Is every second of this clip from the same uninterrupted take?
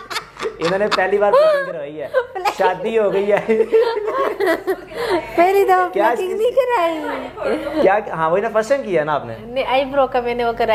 yes; 0 cuts

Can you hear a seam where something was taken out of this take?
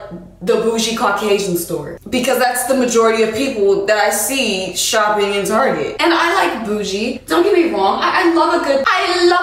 no; 0 cuts

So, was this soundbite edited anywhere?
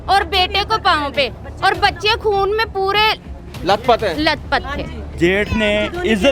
yes; 1 cut; at 5.0 s

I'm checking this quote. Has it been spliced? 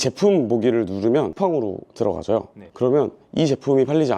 yes; 1 cut; at 1.3 s

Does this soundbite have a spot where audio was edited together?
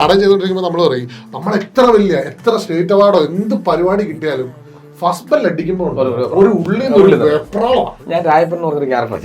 yes; 1 cut; at 8.0 s

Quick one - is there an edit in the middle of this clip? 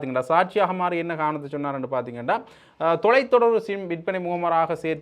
no; 0 cuts

